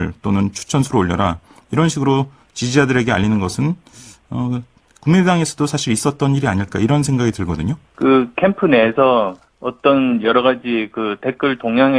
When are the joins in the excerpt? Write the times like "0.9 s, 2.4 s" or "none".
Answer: 7.8 s